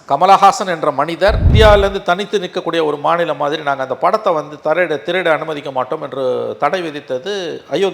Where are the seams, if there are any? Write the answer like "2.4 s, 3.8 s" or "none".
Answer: 1.5 s